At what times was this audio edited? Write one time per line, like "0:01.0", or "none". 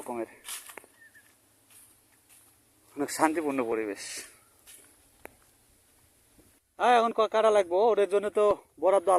0:06.6